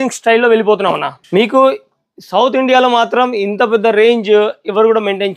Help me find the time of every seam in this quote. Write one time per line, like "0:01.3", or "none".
0:01.1